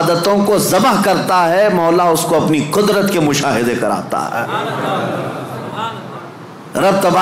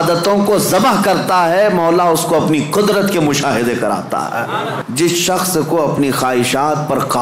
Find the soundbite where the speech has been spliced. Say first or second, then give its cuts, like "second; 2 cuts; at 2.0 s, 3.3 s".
second; 1 cut; at 4.8 s